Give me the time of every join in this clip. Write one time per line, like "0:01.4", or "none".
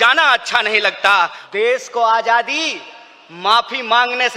0:01.4